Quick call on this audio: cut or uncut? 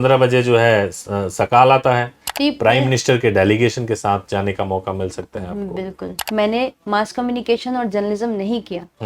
cut